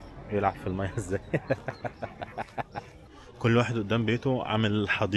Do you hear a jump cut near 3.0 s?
no; 0 cuts

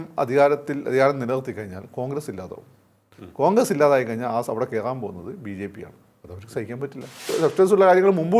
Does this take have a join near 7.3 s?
yes; 1 cut; at 7.3 s

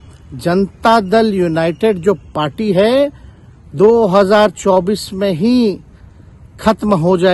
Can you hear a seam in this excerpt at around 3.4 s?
no; 0 cuts

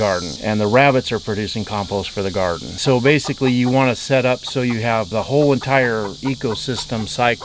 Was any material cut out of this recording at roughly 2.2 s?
no; 1 cut; at 5.1 s

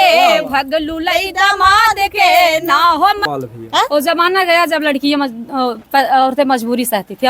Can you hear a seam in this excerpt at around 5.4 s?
no; 1 cut; at 3.2 s

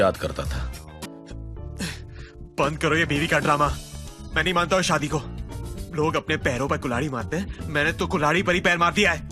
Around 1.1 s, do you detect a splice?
yes; 1 cut; at 1.1 s

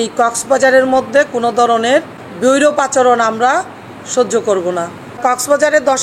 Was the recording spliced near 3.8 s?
no; 2 cuts; at 2.2 s, 5.2 s

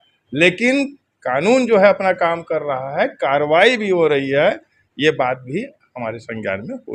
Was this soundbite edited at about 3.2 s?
no; 0 cuts

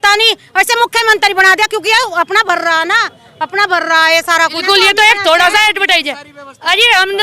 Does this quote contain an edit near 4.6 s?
yes; 1 cut; at 4.6 s

